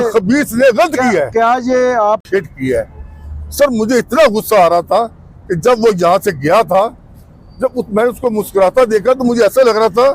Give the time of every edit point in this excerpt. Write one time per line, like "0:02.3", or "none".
0:02.2